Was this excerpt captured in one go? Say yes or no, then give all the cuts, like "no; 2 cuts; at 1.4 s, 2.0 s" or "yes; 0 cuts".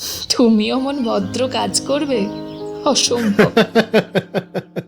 no; 1 cut; at 3.4 s